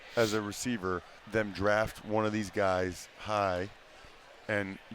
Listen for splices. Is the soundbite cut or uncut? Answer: cut